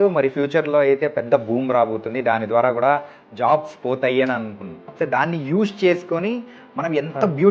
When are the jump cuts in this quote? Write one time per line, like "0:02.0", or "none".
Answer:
0:04.9